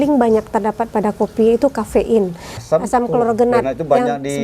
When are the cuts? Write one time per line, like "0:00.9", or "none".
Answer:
0:02.6